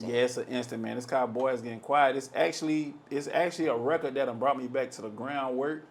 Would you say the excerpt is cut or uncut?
cut